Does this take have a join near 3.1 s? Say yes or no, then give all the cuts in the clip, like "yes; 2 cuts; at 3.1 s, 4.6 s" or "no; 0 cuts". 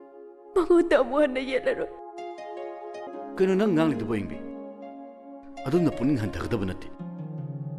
yes; 1 cut; at 3.1 s